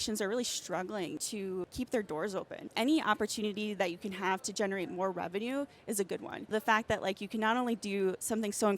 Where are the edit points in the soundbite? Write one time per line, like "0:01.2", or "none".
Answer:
0:01.3
0:02.6
0:06.5